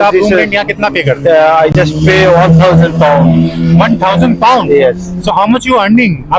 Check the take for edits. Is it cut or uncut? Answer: cut